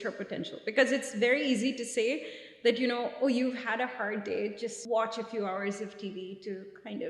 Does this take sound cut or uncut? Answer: cut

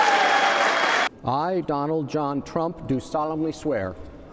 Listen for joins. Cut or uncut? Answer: cut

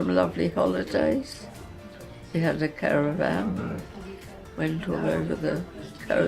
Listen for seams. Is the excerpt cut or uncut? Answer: uncut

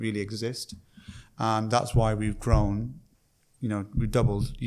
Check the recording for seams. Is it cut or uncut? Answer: uncut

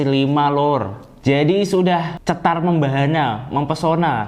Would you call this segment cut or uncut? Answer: cut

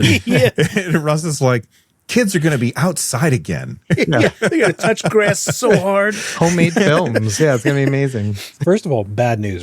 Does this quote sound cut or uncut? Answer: cut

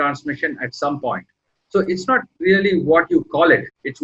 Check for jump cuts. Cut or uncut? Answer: cut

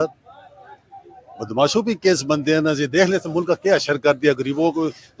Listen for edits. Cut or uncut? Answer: uncut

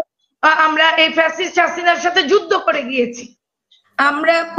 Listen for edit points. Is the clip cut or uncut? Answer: uncut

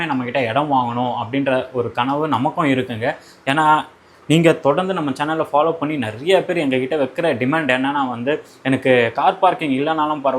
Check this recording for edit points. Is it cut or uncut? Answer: uncut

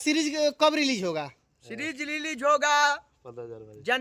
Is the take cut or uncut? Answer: uncut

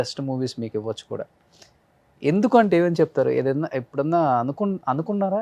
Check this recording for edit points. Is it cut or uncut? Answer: uncut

